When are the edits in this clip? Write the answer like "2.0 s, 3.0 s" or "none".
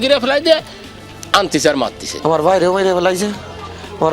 2.1 s